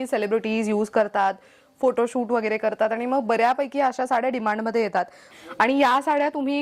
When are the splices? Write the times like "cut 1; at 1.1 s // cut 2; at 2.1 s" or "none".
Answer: cut 1; at 5.2 s